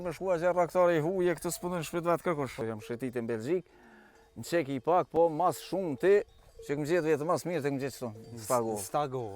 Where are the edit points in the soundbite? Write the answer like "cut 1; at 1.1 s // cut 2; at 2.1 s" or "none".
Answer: cut 1; at 2.6 s